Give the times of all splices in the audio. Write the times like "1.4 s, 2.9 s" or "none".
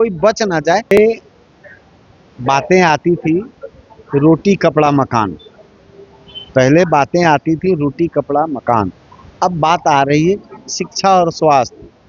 0.9 s